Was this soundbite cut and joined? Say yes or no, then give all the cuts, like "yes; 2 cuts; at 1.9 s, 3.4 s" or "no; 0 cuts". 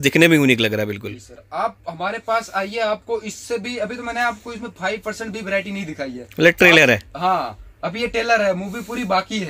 no; 0 cuts